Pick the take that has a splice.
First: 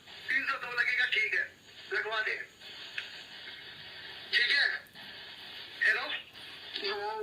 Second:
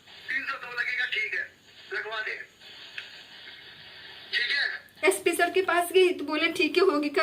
second; 1 cut; at 4.8 s

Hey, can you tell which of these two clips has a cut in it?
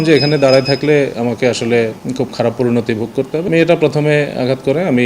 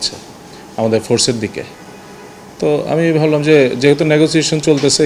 first; 2 cuts; at 2.0 s, 3.5 s

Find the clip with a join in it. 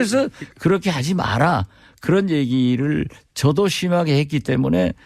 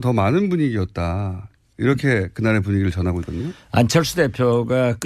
second; 1 cut; at 2.3 s

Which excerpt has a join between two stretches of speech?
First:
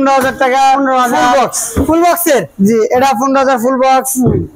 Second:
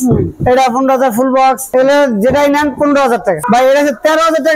second; 2 cuts; at 1.7 s, 3.4 s

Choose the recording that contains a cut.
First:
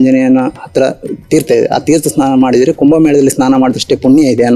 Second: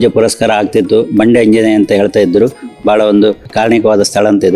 second; 1 cut; at 3.5 s

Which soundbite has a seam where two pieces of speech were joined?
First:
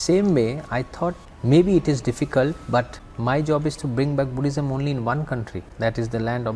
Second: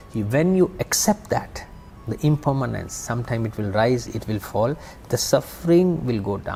first; 3 cuts; at 1.3 s, 3.0 s, 5.6 s

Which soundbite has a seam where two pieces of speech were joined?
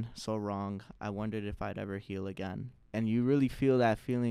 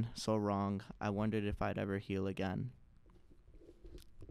first; 1 cut; at 2.8 s

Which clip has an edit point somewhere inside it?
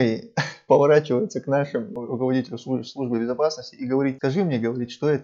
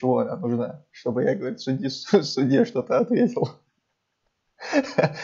first; 2 cuts; at 2.0 s, 4.2 s

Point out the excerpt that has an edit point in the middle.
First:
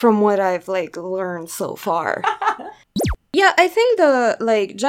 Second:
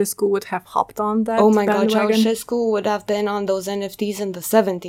first; 1 cut; at 3.1 s

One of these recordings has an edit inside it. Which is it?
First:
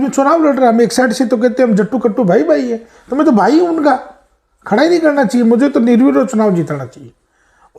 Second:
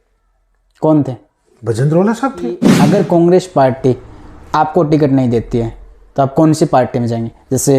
second; 1 cut; at 2.7 s

